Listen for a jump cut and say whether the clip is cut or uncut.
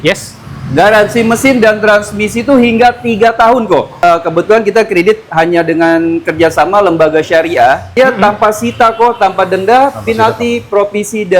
cut